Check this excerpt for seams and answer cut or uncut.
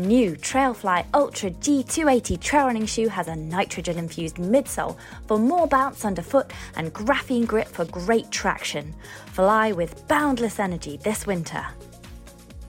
cut